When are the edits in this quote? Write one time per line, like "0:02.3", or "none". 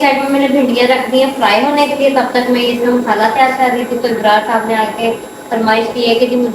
none